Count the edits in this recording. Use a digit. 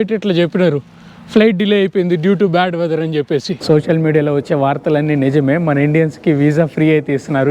1